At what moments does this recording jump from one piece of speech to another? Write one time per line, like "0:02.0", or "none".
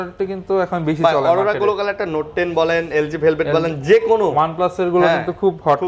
none